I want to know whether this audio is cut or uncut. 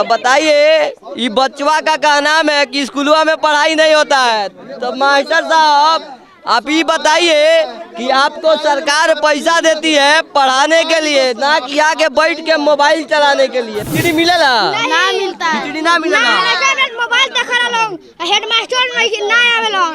cut